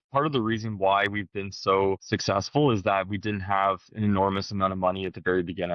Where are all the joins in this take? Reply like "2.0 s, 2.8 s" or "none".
2.0 s